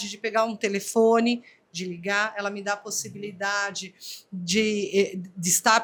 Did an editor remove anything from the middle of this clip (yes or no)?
no